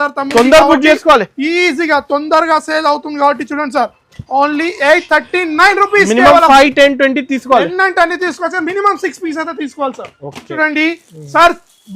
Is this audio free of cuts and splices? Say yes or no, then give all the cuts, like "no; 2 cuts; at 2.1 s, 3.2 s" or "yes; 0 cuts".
no; 1 cut; at 10.5 s